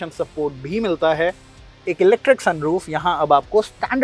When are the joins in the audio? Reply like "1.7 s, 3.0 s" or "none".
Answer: 1.7 s